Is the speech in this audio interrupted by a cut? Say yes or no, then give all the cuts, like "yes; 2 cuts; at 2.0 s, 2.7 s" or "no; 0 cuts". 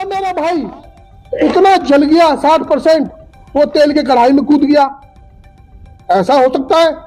no; 0 cuts